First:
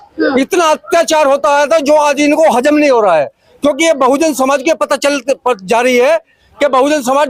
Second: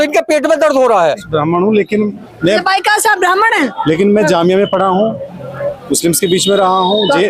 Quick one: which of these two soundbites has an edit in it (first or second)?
second